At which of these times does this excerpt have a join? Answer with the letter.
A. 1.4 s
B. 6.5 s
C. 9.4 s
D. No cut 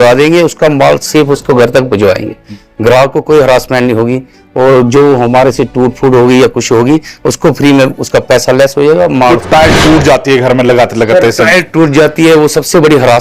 C